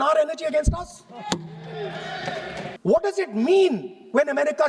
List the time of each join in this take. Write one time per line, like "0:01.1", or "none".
0:02.8